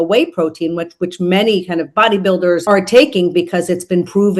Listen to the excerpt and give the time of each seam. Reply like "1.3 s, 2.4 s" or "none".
2.6 s